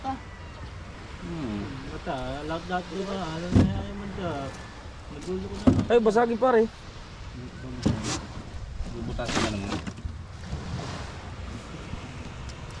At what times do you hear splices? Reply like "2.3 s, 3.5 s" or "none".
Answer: none